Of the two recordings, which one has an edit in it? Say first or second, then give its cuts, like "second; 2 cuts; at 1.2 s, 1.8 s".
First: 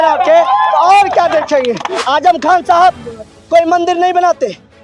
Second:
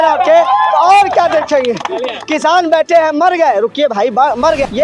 first; 1 cut; at 1.9 s